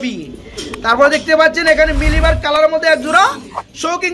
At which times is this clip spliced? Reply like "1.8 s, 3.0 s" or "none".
none